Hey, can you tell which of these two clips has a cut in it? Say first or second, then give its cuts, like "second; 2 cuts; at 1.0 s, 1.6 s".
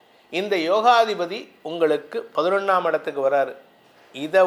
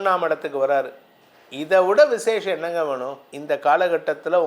second; 1 cut; at 3.3 s